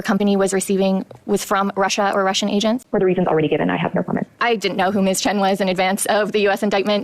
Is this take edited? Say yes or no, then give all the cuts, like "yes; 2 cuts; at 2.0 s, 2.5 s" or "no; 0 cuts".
yes; 2 cuts; at 2.8 s, 4.3 s